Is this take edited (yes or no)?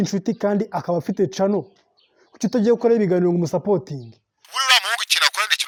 no